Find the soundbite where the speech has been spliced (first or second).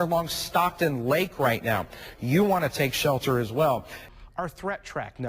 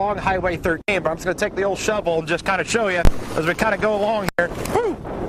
first